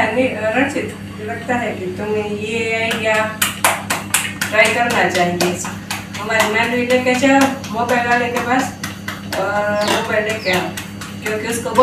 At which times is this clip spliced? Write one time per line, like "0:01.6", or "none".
0:01.3